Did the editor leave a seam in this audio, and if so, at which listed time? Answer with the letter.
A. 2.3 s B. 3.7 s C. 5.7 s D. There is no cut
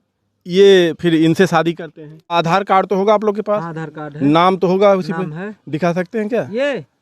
A